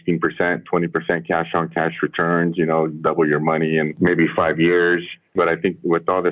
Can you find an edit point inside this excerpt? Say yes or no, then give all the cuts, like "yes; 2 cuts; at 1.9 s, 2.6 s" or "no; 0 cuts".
yes; 2 cuts; at 3.9 s, 5.3 s